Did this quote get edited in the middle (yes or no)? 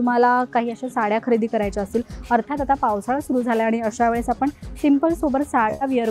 no